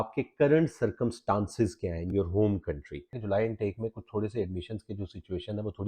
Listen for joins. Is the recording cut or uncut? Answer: cut